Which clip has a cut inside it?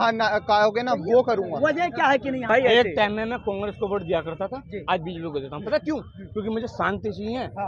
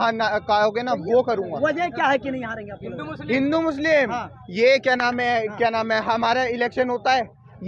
first; 1 cut; at 2.5 s

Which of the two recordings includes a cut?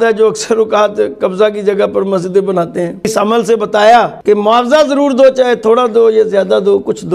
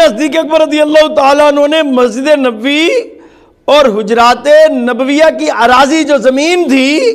first; 2 cuts; at 3.1 s, 4.2 s

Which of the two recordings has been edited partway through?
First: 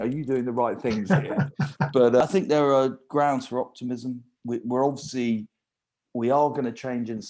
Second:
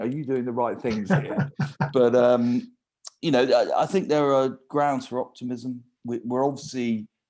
first; 1 cut; at 2.2 s

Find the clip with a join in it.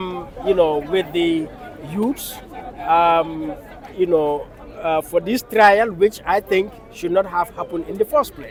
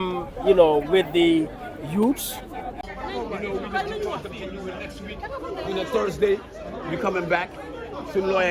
second; 1 cut; at 2.8 s

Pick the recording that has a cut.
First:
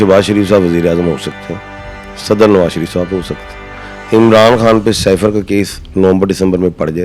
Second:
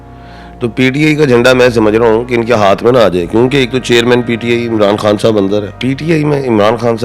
second; 1 cut; at 5.7 s

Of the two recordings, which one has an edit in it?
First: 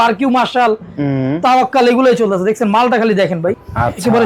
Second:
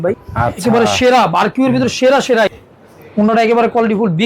second; 1 cut; at 2.5 s

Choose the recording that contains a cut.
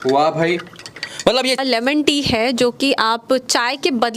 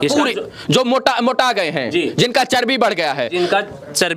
first; 1 cut; at 1.6 s

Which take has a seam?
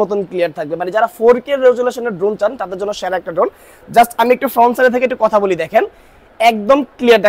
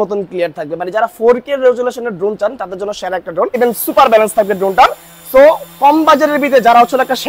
second; 1 cut; at 3.6 s

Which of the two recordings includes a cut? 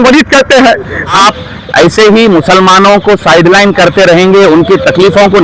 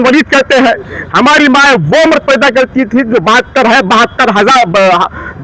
first; 1 cut; at 1.2 s

